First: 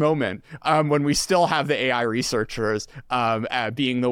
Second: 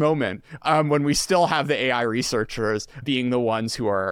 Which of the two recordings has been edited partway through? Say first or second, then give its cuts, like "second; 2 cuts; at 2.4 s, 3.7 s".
second; 1 cut; at 3.0 s